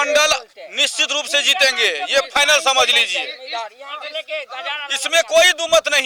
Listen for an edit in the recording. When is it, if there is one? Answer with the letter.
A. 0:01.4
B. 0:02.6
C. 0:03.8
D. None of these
D